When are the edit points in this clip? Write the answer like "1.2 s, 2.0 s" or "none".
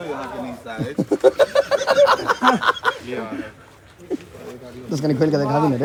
none